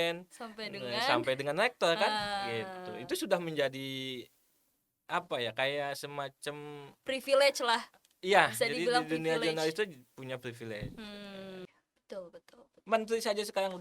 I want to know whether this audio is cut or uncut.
cut